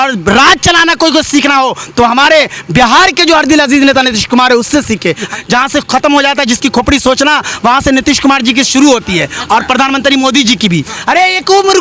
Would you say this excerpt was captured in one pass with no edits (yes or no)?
no